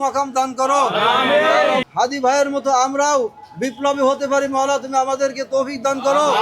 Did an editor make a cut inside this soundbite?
yes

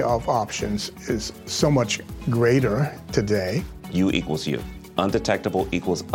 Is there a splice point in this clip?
no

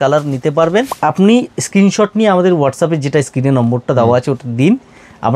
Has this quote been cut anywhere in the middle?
yes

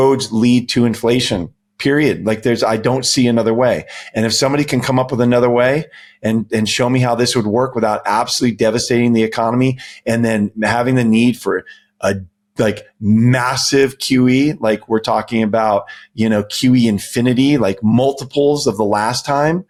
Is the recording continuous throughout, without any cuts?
yes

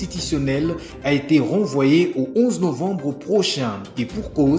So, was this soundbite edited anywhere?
no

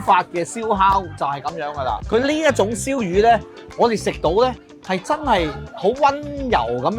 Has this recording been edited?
yes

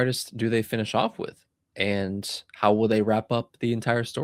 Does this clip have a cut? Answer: no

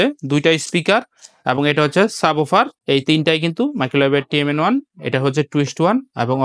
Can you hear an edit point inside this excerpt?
yes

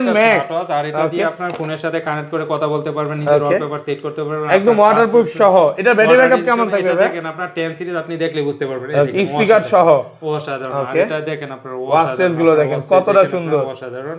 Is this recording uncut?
yes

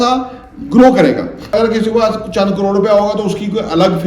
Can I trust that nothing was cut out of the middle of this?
no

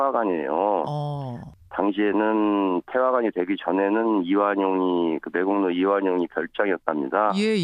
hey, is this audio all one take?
yes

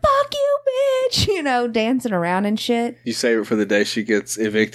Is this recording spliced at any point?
yes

